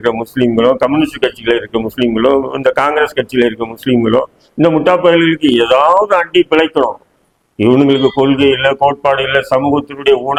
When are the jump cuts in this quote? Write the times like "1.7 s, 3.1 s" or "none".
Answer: none